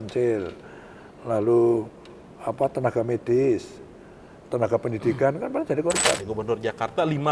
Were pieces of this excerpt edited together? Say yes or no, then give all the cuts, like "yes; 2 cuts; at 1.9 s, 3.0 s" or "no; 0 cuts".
yes; 1 cut; at 6.3 s